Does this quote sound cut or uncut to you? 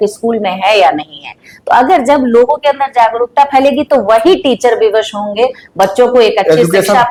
uncut